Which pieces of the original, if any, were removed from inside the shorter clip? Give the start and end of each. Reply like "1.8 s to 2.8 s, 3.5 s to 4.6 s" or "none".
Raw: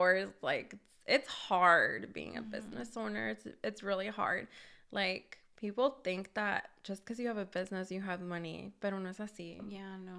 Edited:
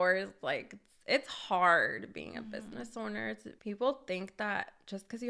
3.5 s to 5.4 s